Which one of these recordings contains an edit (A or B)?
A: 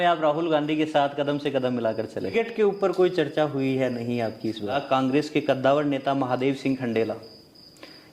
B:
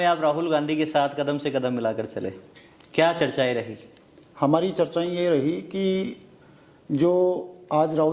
A